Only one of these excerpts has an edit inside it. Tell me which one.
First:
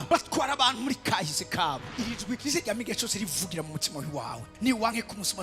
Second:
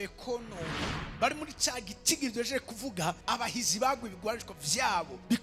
first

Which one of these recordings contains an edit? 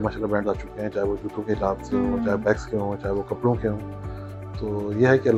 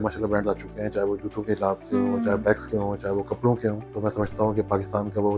second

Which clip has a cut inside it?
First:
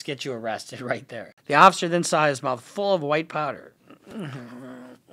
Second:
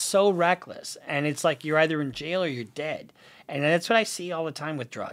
first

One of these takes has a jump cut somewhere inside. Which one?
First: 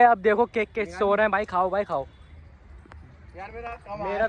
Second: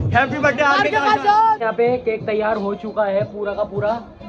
second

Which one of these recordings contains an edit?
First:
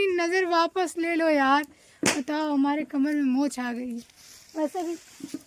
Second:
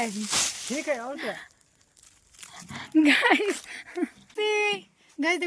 second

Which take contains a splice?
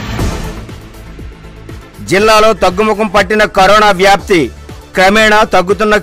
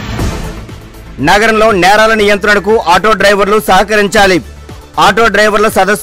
first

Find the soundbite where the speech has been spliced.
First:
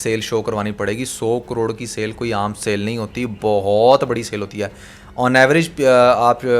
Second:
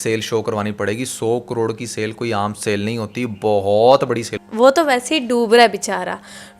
second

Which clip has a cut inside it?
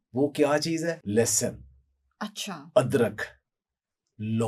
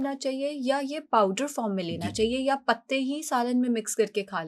first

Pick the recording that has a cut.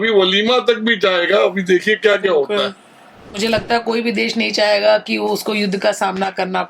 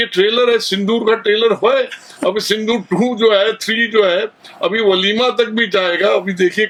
first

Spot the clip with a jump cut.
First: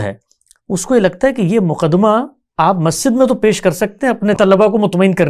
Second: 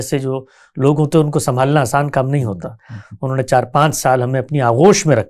first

